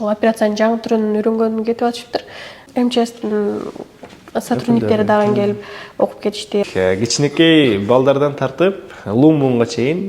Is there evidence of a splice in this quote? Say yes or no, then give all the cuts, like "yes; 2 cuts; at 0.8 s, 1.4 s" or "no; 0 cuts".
yes; 2 cuts; at 2.6 s, 6.6 s